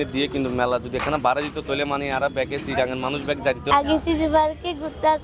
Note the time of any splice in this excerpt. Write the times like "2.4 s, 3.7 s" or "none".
3.6 s